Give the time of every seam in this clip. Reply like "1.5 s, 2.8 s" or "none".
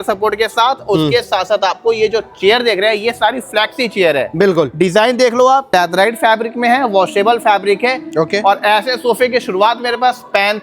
5.7 s